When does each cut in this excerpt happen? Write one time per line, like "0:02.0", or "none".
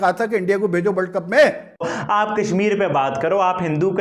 0:01.9